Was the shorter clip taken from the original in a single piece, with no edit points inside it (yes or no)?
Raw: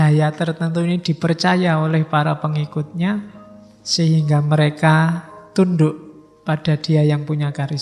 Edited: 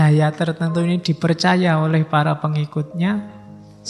yes